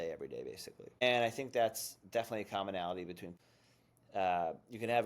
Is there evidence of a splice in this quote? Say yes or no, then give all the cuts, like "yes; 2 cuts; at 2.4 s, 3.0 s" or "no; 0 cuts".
yes; 2 cuts; at 1.0 s, 3.3 s